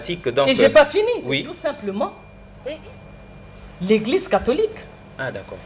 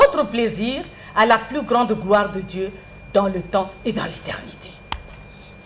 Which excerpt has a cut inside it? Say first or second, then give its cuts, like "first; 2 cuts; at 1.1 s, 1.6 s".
first; 1 cut; at 1.5 s